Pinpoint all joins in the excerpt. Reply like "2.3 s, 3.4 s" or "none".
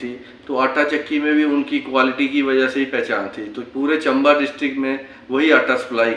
none